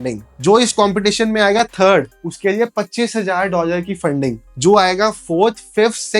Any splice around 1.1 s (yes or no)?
no